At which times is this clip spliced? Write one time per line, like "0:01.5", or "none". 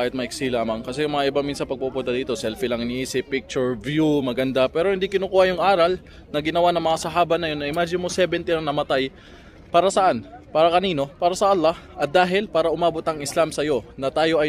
none